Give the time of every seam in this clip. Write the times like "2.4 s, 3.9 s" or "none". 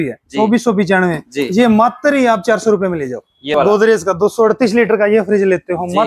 3.5 s